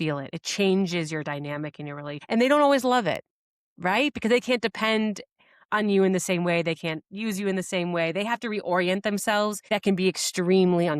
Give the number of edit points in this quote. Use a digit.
2